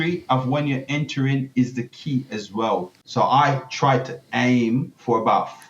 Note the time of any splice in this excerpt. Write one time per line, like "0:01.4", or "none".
0:03.0